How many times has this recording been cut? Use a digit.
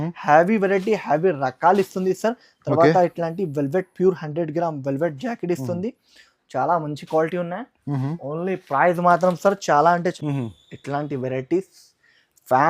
1